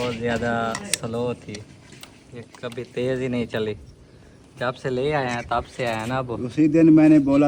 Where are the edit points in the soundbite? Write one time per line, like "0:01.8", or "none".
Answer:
none